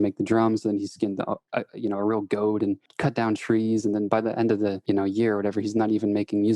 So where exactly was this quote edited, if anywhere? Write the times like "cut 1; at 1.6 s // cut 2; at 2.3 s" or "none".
cut 1; at 2.9 s // cut 2; at 4.8 s